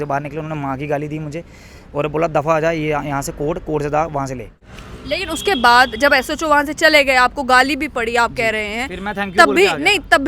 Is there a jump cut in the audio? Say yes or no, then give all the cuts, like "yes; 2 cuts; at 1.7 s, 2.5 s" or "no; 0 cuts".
yes; 1 cut; at 4.7 s